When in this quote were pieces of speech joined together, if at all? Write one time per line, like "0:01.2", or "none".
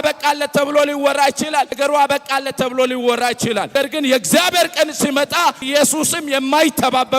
0:01.7
0:03.7
0:05.7

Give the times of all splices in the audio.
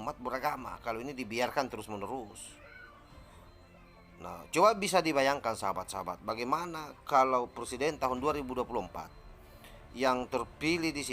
none

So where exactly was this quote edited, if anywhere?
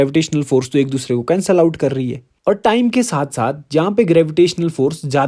0:02.2

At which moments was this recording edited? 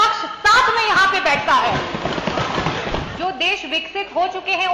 0:03.1

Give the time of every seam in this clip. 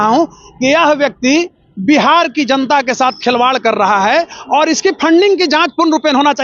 none

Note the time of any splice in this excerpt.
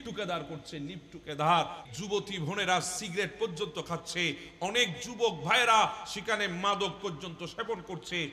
0:01.8

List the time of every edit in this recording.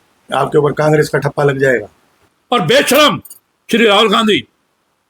0:02.3

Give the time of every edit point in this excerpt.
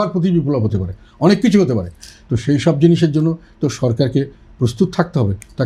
none

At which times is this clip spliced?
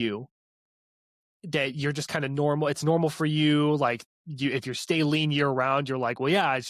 none

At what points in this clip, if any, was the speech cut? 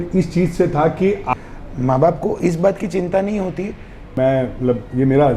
0:01.3
0:04.1

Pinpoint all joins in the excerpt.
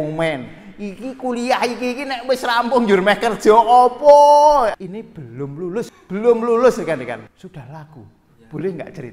0:04.8
0:06.0
0:07.4

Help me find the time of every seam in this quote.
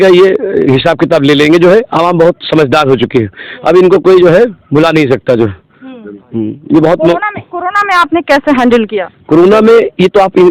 none

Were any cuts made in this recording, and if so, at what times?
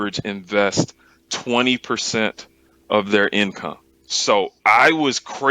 0:04.1

